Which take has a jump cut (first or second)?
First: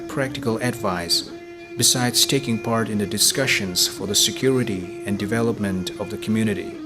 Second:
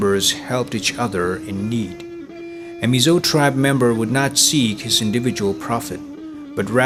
first